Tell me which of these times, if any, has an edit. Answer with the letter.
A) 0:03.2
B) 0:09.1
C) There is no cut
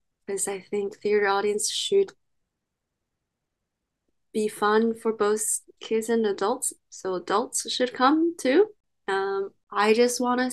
B